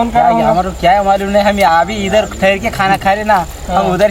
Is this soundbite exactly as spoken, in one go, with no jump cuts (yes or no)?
yes